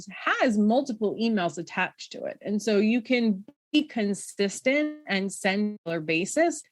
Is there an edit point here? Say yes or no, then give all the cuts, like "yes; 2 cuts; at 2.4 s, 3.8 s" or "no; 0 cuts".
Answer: yes; 1 cut; at 5.8 s